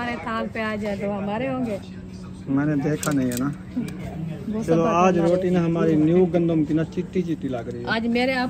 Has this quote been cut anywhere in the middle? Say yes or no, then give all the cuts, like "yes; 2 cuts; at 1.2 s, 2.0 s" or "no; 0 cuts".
no; 0 cuts